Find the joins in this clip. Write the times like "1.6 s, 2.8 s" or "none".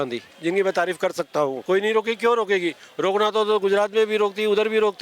1.6 s